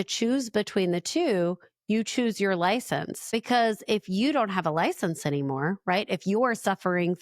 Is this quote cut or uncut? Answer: cut